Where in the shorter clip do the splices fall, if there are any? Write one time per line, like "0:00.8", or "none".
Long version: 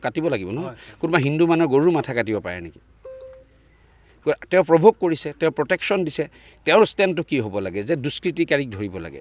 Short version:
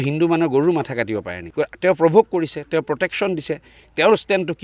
0:01.4